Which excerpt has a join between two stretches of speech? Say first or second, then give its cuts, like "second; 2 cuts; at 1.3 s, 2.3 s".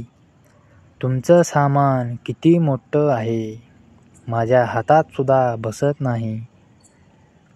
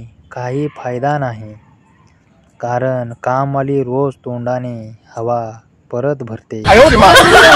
second; 1 cut; at 6.6 s